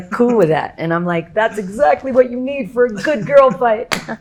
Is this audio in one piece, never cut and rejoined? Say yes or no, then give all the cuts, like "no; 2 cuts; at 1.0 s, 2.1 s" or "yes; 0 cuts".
yes; 0 cuts